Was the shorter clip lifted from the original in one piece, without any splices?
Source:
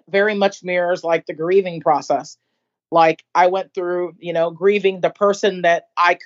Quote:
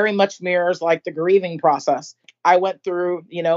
no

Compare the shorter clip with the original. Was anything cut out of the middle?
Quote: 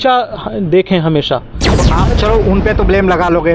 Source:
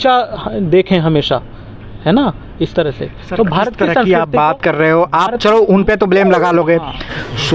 yes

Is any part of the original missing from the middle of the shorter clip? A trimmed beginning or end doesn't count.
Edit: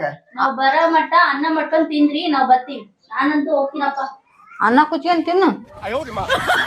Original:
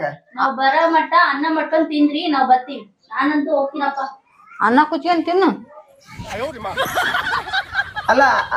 yes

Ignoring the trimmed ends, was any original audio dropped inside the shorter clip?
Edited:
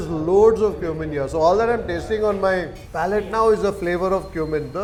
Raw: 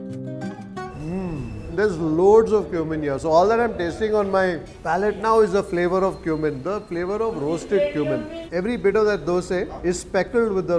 no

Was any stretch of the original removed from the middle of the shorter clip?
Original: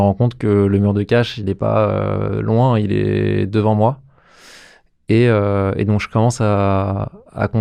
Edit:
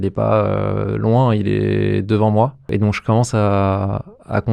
yes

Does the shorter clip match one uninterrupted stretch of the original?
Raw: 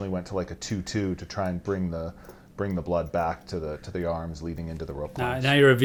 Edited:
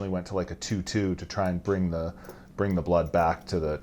yes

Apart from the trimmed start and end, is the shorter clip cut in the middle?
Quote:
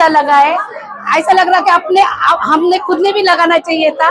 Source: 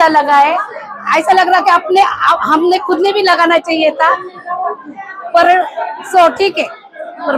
no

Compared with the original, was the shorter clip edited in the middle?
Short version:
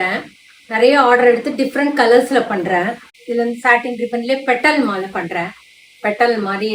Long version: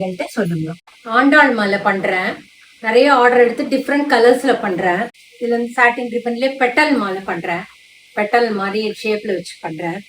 no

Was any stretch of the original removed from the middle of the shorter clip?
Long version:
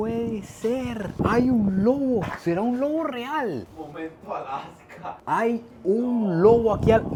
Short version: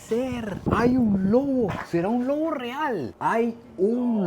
yes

